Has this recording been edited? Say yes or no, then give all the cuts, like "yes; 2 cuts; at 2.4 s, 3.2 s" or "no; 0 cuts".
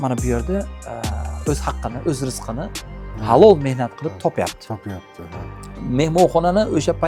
no; 0 cuts